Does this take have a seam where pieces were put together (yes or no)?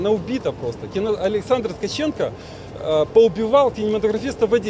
no